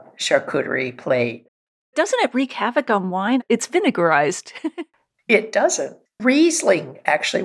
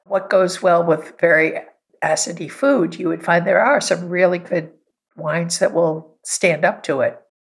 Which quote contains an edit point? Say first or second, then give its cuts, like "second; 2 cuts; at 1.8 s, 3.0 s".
first; 4 cuts; at 1.9 s, 3.4 s, 4.6 s, 6.0 s